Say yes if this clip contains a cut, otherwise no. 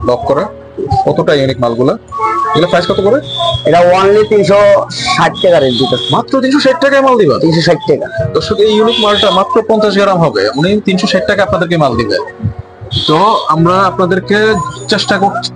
no